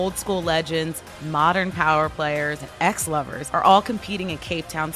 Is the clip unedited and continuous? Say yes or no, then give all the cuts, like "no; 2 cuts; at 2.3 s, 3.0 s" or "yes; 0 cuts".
no; 1 cut; at 3.0 s